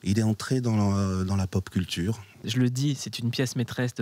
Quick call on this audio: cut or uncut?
cut